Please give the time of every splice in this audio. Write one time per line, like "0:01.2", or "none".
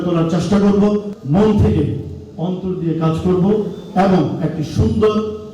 0:01.1